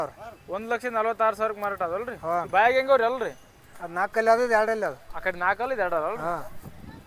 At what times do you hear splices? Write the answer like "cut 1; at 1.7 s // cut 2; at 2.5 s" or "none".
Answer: none